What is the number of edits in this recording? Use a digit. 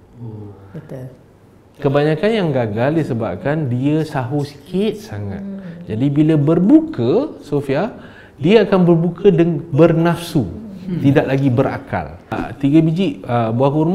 1